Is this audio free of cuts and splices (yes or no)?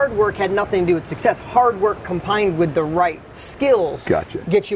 yes